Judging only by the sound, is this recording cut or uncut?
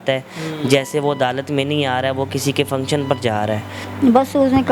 cut